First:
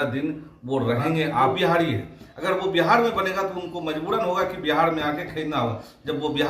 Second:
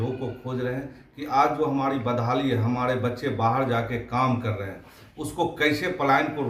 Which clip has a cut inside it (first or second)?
first